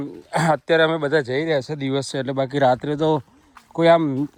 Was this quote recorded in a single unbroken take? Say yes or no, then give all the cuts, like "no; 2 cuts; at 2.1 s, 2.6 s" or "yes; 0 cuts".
yes; 0 cuts